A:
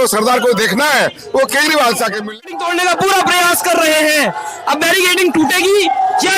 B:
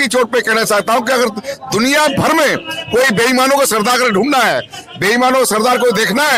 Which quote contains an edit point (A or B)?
A